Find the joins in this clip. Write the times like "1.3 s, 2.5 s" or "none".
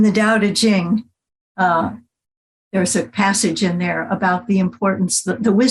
none

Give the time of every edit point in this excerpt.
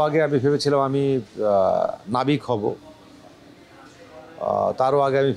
none

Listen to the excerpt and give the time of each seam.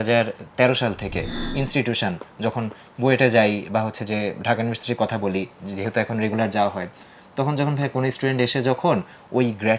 1.4 s

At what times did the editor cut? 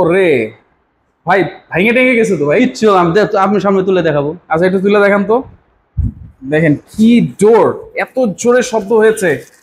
none

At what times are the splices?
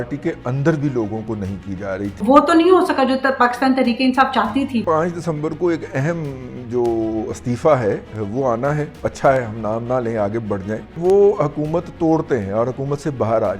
2.2 s, 4.8 s, 9.0 s, 10.9 s

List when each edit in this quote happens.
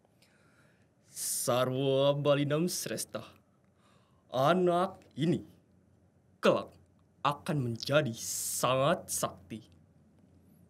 none

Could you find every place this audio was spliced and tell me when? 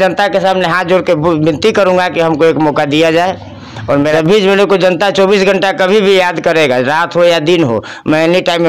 4.0 s

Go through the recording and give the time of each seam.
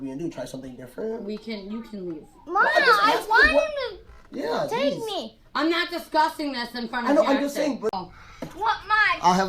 8.0 s

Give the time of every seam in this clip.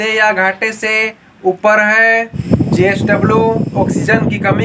2.3 s

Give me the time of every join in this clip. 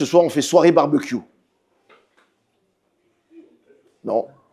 none

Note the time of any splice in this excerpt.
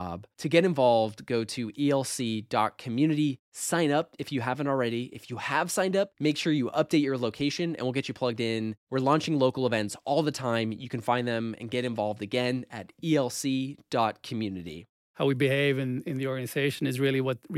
14.9 s

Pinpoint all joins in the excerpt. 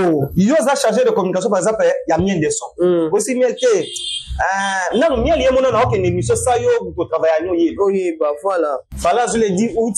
8.9 s

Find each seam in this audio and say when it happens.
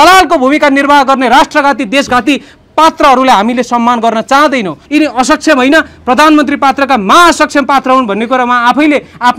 4.8 s

